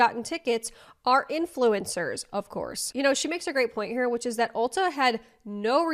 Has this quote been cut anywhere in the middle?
no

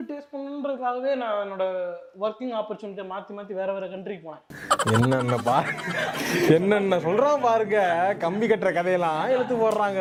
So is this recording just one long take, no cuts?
yes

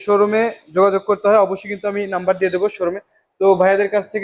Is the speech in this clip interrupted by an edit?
no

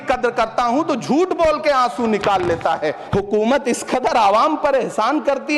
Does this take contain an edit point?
yes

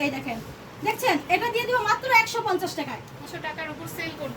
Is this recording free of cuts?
no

